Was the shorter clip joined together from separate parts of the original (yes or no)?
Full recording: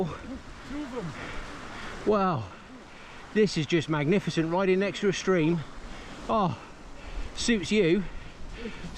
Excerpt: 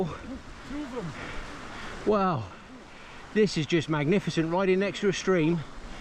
no